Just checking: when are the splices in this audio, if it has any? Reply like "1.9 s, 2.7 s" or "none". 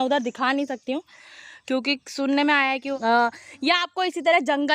2.9 s